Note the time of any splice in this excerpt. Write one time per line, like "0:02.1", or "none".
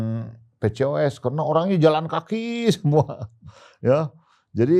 none